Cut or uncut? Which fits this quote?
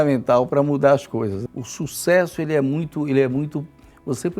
cut